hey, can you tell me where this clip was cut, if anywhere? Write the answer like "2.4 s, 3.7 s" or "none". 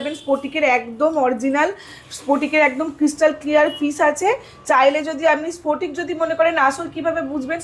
none